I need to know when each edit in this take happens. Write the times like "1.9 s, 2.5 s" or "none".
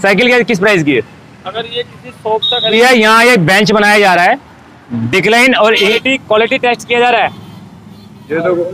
2.7 s, 5.9 s